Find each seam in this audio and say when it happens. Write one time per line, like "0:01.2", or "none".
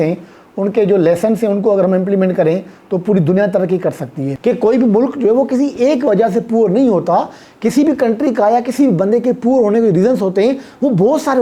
0:04.3